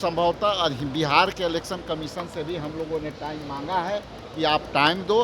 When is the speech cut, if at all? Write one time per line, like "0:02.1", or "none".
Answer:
none